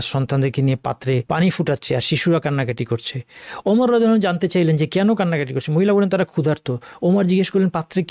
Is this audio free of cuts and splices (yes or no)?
no